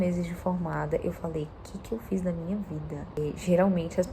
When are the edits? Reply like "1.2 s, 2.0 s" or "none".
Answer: 3.2 s